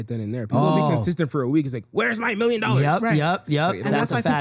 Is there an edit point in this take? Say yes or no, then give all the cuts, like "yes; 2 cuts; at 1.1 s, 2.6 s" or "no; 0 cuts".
no; 0 cuts